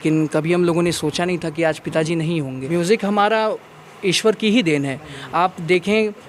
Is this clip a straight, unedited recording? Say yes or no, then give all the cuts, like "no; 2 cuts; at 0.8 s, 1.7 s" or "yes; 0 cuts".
no; 1 cut; at 2.6 s